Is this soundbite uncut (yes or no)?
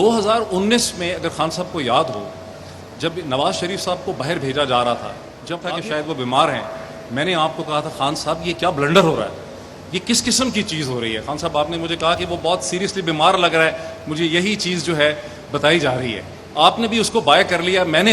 no